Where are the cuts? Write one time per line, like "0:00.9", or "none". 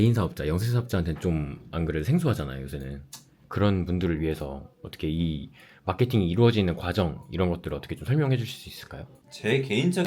none